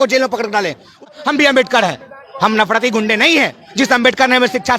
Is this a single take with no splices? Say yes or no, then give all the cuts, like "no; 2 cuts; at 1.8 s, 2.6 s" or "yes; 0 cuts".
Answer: no; 1 cut; at 1.0 s